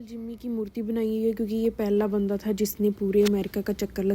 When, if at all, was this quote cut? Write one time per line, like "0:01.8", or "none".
none